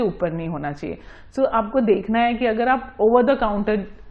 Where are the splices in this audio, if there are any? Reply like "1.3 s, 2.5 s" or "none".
none